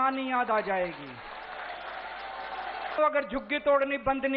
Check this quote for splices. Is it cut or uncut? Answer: cut